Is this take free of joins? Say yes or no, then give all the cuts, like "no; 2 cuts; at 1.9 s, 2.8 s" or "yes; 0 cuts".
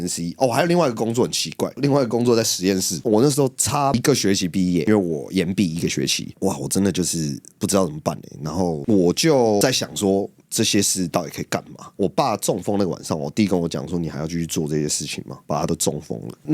no; 1 cut; at 3.0 s